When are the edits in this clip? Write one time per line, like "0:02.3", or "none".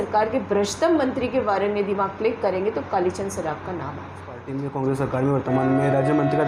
0:04.5